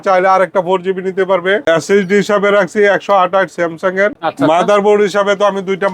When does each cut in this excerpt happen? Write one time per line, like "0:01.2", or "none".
0:01.6
0:04.2